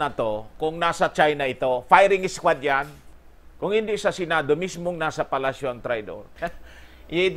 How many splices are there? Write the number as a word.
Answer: two